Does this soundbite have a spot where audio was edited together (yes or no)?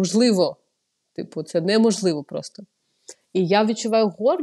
no